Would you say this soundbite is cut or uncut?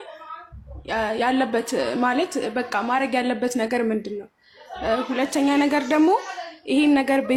uncut